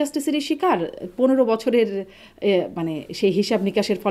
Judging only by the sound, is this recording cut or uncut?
uncut